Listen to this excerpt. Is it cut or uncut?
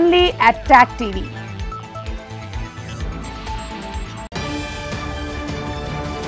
cut